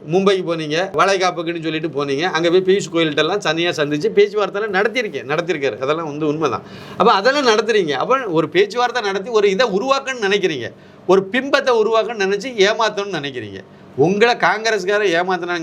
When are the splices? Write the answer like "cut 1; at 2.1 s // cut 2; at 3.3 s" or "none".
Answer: cut 1; at 0.9 s